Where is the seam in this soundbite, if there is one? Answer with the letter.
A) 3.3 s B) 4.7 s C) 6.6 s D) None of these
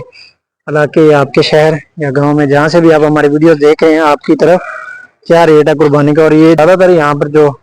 C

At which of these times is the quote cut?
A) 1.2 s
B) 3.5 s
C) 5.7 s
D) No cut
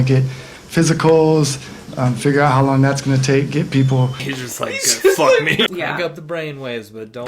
C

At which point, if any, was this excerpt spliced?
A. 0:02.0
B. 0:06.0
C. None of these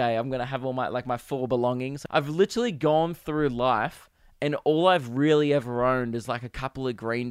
A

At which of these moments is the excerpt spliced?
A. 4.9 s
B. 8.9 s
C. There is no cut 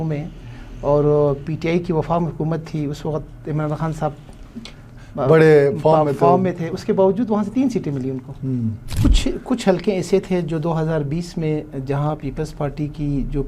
B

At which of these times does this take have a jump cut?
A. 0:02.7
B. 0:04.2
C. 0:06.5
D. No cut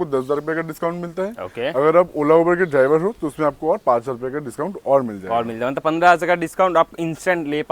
D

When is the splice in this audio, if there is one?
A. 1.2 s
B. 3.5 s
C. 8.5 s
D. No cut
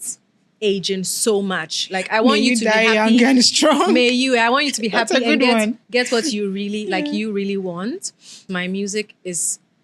C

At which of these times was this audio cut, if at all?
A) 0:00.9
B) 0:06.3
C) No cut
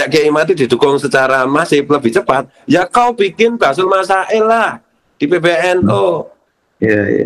C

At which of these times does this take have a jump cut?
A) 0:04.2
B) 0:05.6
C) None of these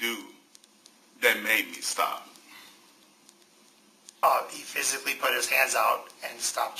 A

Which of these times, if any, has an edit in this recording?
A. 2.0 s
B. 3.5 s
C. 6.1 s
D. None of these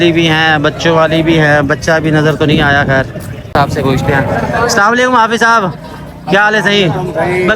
B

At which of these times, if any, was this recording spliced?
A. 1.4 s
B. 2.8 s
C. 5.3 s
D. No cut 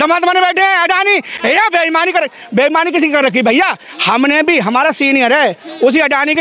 D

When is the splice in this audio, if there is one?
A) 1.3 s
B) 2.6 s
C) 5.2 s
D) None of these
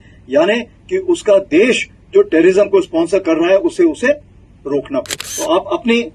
C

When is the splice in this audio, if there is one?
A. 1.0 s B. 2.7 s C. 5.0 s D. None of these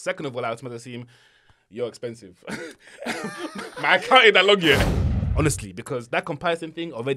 C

